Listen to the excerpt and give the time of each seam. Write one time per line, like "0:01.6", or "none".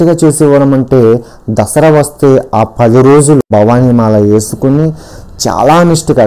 0:03.5